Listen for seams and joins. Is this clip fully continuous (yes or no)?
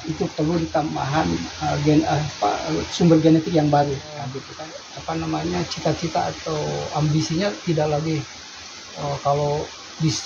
no